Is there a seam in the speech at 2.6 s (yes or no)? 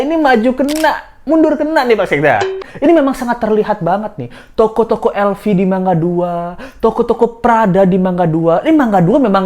yes